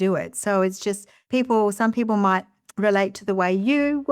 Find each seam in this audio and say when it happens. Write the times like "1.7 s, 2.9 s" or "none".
1.1 s